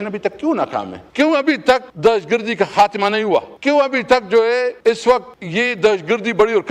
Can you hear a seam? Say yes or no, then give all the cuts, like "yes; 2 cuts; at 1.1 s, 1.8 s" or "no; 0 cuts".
yes; 5 cuts; at 1.0 s, 1.9 s, 3.5 s, 4.8 s, 5.4 s